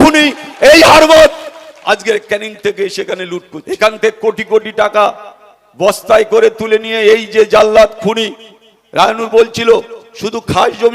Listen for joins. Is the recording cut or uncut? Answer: cut